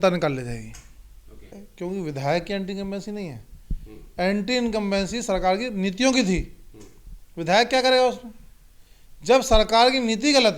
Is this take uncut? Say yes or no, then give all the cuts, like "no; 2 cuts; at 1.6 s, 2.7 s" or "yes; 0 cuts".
no; 1 cut; at 1.6 s